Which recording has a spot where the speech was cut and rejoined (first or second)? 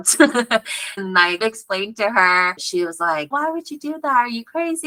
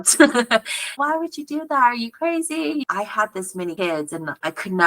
second